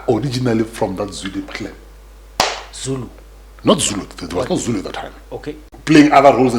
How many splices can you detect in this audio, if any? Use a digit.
1